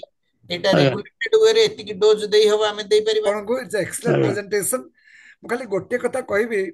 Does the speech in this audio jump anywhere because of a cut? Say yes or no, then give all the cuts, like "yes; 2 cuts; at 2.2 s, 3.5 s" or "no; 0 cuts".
yes; 1 cut; at 3.2 s